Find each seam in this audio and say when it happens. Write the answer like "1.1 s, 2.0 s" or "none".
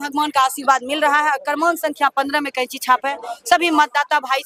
none

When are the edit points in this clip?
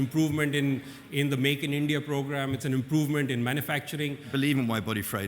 2.6 s, 4.3 s

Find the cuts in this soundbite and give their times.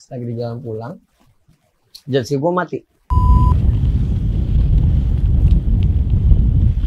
2.9 s

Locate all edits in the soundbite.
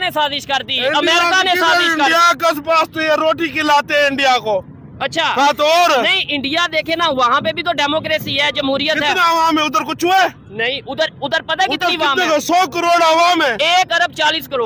none

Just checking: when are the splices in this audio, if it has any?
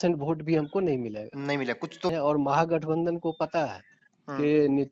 2.1 s

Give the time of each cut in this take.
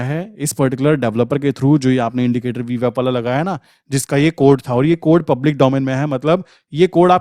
none

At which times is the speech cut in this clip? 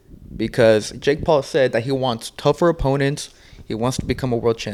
none

